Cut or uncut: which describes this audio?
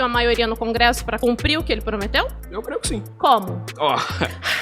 cut